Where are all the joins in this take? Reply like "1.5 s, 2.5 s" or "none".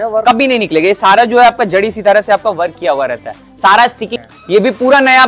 4.1 s